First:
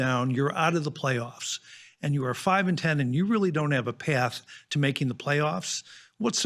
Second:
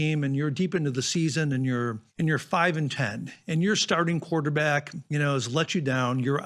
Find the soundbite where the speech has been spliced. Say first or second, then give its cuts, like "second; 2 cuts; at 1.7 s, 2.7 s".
second; 2 cuts; at 2.0 s, 5.0 s